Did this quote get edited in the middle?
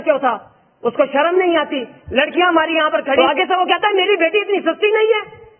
yes; 1 cut; at 3.2 s

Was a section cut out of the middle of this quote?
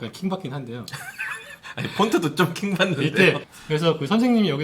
yes; 1 cut; at 3.4 s

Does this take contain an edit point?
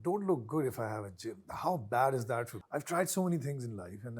yes; 1 cut; at 2.6 s

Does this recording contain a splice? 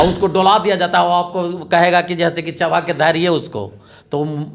no; 0 cuts

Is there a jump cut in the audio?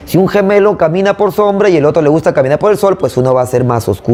no; 0 cuts

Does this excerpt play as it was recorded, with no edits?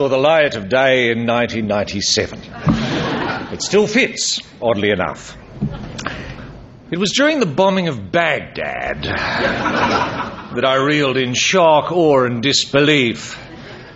no; 1 cut; at 6.3 s

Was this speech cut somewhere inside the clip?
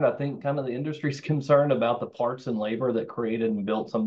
no; 0 cuts

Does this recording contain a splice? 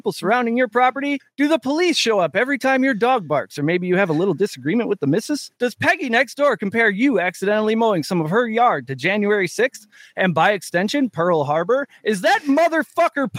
yes; 2 cuts; at 1.2 s, 5.5 s

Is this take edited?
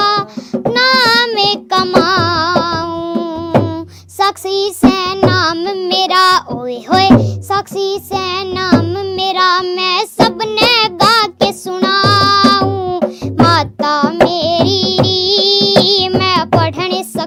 no; 0 cuts

